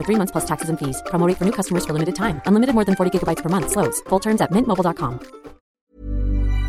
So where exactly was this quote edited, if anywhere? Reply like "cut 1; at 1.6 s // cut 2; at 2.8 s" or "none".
cut 1; at 5.8 s